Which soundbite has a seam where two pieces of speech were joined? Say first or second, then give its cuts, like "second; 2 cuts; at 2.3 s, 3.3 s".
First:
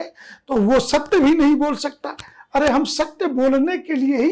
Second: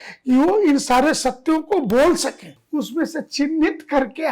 second; 1 cut; at 2.5 s